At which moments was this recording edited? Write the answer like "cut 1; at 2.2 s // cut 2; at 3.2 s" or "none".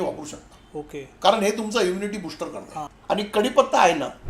cut 1; at 2.8 s